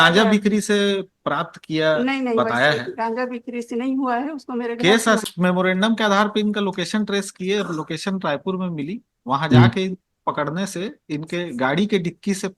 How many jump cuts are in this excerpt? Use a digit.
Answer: 1